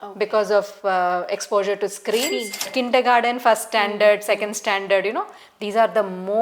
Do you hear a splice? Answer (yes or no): yes